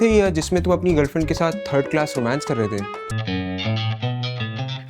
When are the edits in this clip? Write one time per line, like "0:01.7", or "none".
0:03.1